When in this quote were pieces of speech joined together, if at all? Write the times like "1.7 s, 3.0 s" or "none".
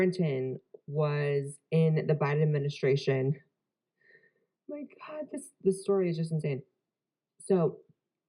3.0 s